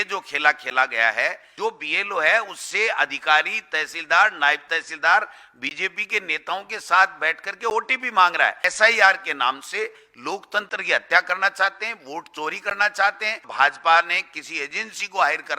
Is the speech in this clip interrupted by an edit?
yes; 3 cuts; at 1.4 s, 8.6 s, 13.5 s

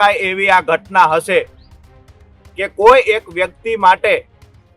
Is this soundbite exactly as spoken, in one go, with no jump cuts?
yes; 0 cuts

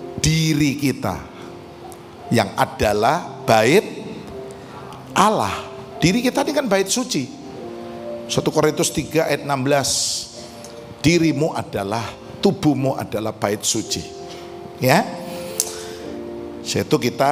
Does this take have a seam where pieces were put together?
no; 0 cuts

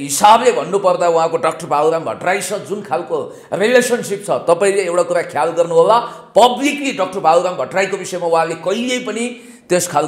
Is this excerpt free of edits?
yes; 0 cuts

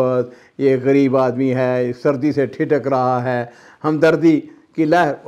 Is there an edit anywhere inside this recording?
no; 0 cuts

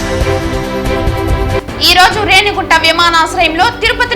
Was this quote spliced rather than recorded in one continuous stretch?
no; 0 cuts

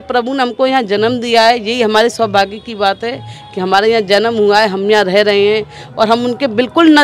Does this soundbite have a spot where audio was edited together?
no; 0 cuts

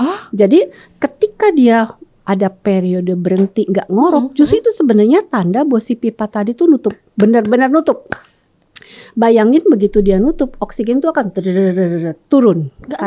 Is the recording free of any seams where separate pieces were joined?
yes; 0 cuts

